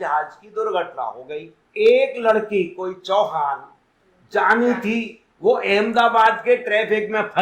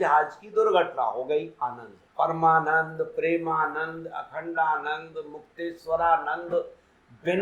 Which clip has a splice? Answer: second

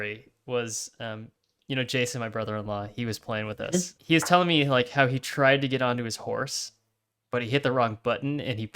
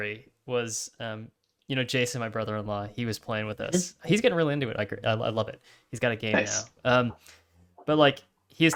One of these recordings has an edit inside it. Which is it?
first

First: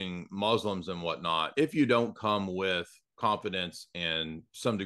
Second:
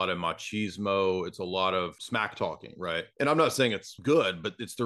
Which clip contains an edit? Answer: second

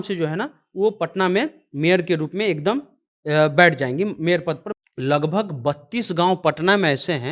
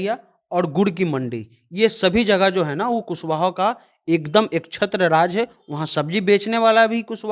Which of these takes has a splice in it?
first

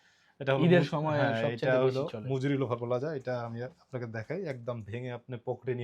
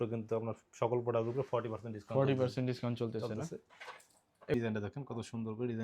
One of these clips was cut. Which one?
second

